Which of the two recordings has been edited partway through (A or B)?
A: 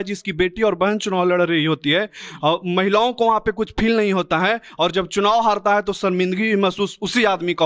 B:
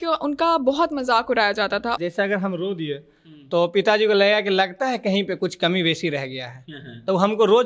B